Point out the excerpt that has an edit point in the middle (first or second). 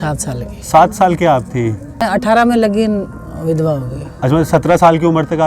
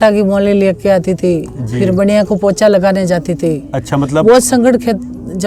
first